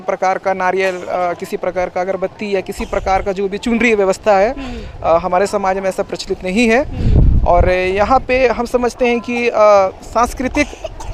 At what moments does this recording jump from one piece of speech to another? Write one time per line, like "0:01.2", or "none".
none